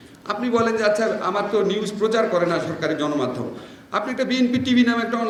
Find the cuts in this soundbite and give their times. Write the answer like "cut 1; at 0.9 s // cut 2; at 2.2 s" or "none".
none